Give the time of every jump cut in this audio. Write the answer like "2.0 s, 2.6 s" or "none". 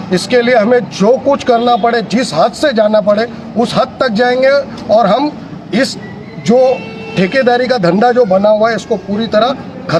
none

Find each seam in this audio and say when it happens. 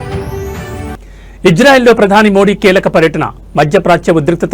0.9 s

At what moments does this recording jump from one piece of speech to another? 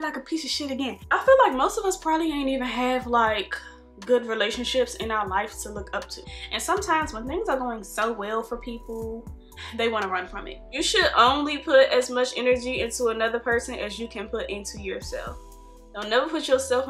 1.0 s, 6.2 s, 10.6 s

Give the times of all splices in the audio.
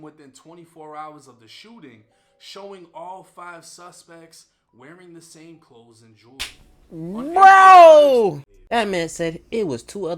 8.5 s

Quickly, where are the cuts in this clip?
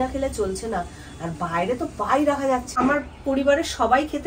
2.8 s

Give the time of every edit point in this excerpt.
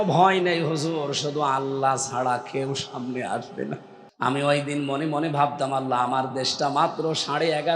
4.0 s

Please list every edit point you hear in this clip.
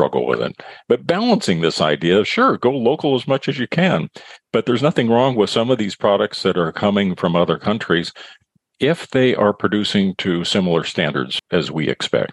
11.4 s

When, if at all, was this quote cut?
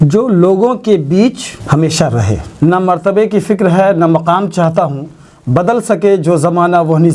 2.5 s

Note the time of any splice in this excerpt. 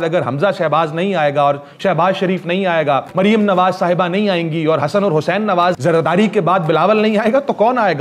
3.1 s, 5.8 s

